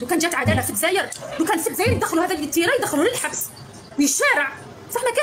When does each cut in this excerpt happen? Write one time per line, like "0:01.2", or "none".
none